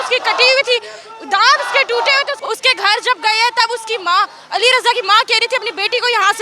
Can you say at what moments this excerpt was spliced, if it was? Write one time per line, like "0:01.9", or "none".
0:02.4